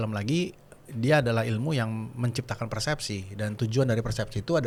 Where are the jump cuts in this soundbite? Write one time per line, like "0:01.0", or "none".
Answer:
none